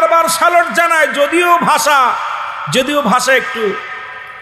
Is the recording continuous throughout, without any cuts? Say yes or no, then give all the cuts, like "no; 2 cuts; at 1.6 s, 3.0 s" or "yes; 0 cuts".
yes; 0 cuts